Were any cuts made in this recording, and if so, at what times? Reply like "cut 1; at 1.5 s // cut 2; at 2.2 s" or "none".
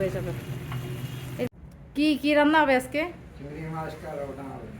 cut 1; at 1.5 s